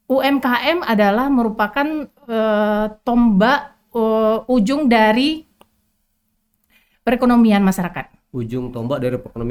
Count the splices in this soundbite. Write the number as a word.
zero